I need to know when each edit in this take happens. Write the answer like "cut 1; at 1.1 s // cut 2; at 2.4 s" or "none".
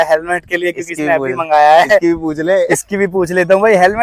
none